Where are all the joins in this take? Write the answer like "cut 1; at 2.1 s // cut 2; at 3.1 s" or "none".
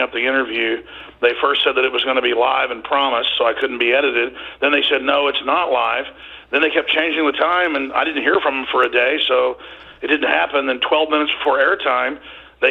none